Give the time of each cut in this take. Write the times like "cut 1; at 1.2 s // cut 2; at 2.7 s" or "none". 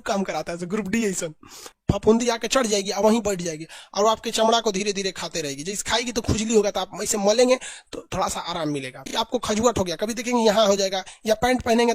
cut 1; at 1.8 s // cut 2; at 9.1 s